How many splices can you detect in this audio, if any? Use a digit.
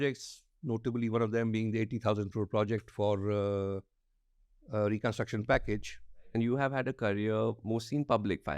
1